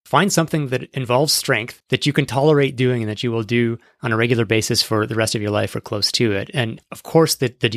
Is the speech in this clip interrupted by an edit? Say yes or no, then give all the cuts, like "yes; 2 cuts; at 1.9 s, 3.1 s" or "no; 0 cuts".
yes; 3 cuts; at 0.9 s, 1.7 s, 6.8 s